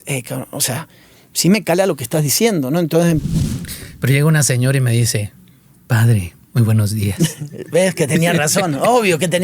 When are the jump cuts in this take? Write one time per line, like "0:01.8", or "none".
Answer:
0:03.4